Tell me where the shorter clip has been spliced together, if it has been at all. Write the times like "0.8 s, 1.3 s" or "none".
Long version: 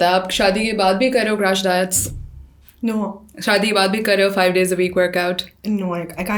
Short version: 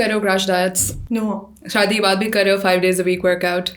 0.9 s